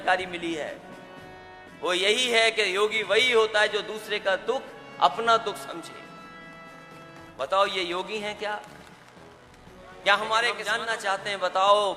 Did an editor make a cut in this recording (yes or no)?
yes